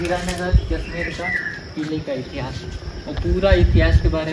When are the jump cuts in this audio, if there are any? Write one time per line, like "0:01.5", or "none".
none